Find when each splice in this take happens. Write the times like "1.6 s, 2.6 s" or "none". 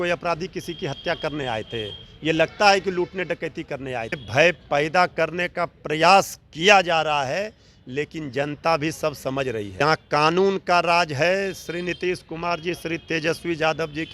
4.2 s, 9.8 s